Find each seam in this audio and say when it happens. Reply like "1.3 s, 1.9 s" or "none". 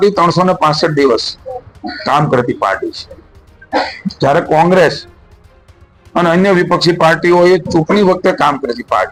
none